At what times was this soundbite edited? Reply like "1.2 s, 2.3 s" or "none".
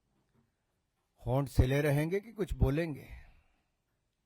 none